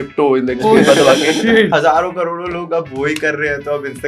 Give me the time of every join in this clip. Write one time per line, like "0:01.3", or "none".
0:01.7